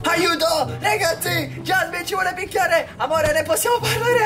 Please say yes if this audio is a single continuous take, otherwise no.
yes